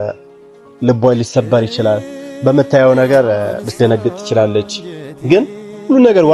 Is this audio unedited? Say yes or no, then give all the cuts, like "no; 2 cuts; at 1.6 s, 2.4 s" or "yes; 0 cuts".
yes; 0 cuts